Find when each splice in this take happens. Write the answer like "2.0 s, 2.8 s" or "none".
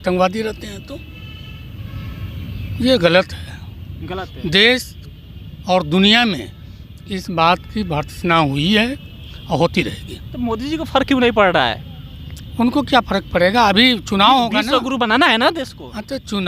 none